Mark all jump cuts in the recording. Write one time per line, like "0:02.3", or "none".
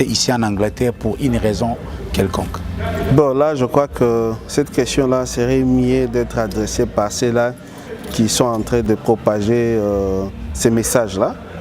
0:08.9